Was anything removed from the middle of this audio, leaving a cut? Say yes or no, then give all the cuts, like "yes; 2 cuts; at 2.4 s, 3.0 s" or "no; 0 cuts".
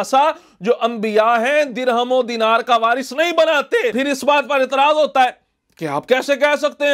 yes; 1 cut; at 3.9 s